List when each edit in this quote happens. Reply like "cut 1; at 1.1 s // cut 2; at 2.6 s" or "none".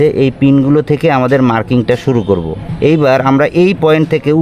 cut 1; at 2.6 s